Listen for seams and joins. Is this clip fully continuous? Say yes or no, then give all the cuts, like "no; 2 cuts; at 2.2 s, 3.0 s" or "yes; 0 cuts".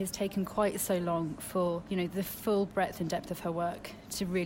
no; 1 cut; at 1.8 s